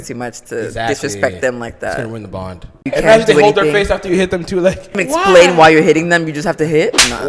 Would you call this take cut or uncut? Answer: cut